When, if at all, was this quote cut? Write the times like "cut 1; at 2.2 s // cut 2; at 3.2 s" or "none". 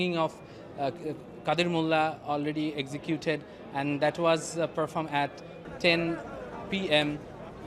none